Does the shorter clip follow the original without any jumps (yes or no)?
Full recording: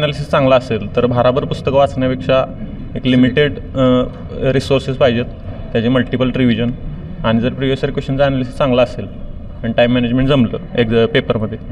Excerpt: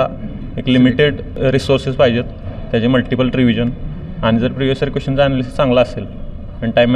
no